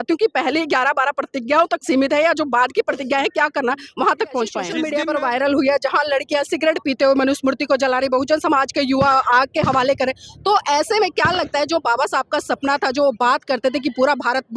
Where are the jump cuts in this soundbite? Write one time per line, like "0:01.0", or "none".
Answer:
0:04.7